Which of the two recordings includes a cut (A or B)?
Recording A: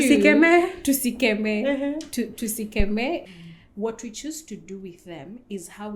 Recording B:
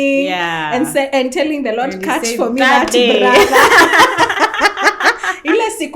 A